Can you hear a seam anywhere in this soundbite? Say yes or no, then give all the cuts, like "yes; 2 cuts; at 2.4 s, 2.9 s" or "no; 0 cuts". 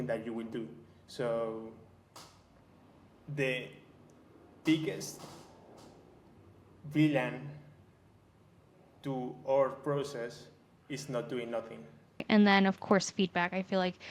yes; 1 cut; at 12.2 s